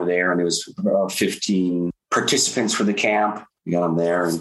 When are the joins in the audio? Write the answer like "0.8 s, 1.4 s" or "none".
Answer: 1.9 s, 3.5 s